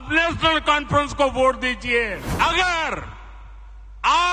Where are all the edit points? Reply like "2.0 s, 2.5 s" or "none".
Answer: 2.2 s